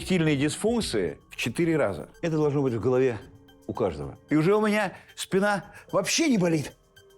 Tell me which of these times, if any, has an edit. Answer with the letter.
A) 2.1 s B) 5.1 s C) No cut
A